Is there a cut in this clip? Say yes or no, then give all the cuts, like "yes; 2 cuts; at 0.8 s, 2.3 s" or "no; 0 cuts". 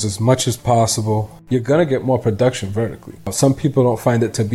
yes; 2 cuts; at 1.3 s, 3.3 s